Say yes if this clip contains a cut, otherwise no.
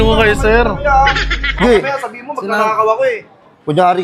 no